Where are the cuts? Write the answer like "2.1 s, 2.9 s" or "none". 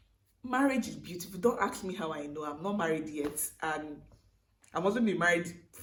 none